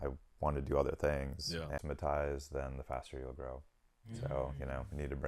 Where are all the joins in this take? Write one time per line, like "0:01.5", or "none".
0:01.8

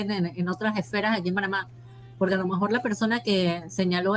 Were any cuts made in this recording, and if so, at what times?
none

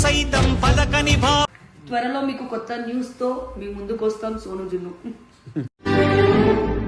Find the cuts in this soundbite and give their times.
0:01.5

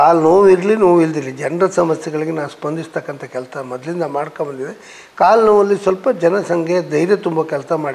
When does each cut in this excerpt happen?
none

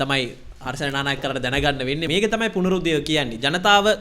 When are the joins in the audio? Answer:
0:02.1

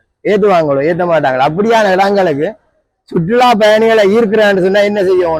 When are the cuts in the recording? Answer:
none

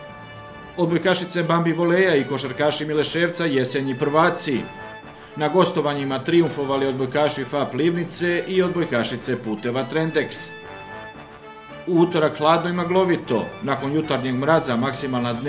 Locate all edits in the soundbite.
0:10.4
0:11.8

